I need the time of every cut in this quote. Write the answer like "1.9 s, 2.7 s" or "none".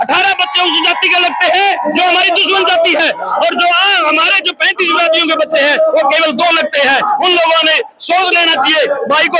none

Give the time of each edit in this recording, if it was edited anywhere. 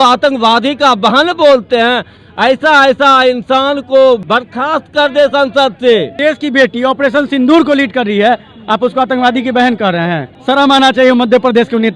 4.2 s, 6.2 s, 10.3 s

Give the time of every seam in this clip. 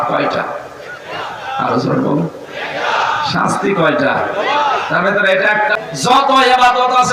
5.8 s

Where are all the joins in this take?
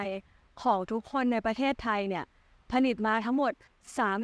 none

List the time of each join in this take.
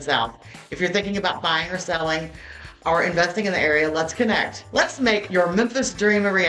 5.1 s

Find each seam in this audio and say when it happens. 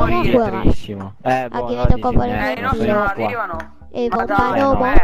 none

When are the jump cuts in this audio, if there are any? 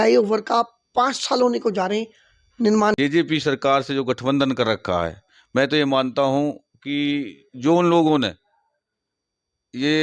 2.9 s

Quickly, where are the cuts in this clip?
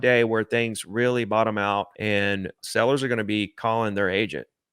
2.4 s

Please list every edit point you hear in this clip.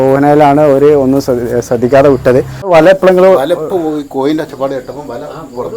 2.7 s

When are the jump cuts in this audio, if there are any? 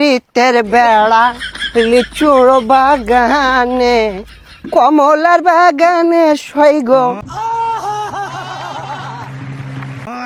none

